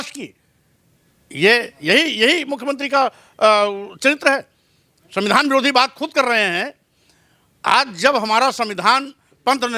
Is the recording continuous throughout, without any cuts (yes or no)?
yes